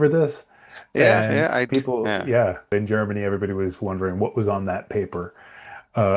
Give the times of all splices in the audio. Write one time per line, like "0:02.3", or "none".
0:02.7